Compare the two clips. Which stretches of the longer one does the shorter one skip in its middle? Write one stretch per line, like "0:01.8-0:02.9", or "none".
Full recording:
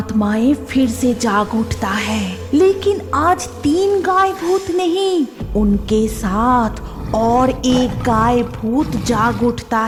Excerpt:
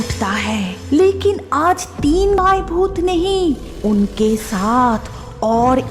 0:04.0-0:04.1

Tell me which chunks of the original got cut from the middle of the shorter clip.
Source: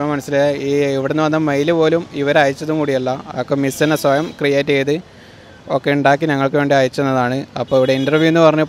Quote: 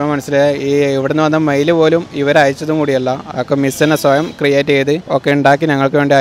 0:05.0-0:05.6

